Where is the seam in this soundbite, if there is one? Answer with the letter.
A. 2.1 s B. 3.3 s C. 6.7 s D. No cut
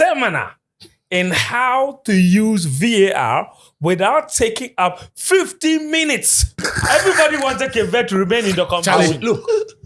C